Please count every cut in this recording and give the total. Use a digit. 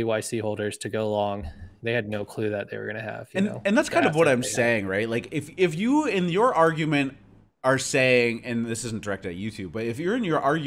0